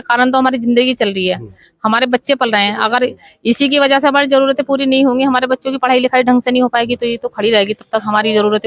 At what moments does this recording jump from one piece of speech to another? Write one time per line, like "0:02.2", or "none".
none